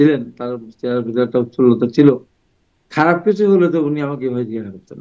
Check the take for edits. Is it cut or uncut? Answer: uncut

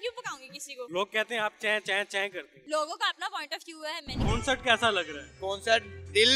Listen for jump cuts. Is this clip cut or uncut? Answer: cut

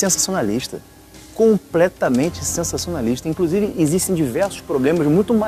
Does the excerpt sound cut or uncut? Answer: uncut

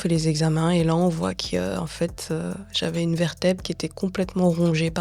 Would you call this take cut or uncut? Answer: uncut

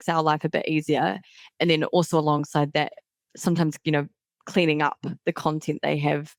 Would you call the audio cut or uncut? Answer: uncut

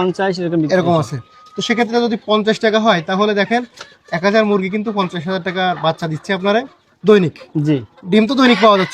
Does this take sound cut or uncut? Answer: uncut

